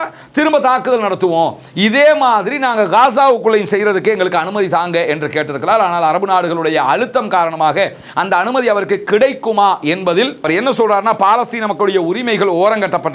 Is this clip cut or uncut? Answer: cut